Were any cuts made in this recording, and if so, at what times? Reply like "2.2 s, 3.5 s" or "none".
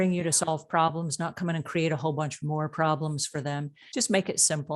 3.8 s

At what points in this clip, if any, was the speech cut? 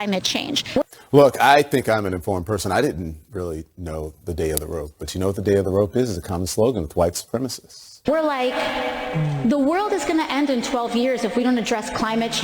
0.8 s, 7.9 s

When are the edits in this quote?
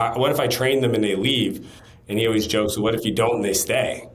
none

